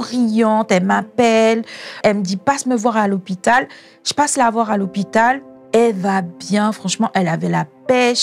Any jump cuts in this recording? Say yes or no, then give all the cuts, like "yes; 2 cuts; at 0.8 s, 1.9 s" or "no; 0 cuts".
yes; 1 cut; at 2.0 s